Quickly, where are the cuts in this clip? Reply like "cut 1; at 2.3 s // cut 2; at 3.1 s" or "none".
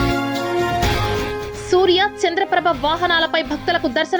cut 1; at 1.1 s